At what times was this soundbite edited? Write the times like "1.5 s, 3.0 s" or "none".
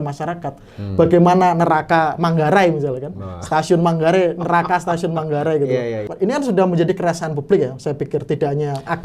6.1 s